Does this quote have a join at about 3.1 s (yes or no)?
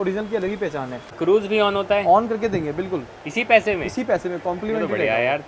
no